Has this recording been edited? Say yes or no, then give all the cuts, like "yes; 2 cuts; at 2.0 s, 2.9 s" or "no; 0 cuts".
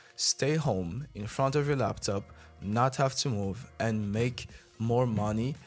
no; 0 cuts